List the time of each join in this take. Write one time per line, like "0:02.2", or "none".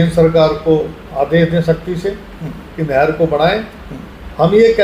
none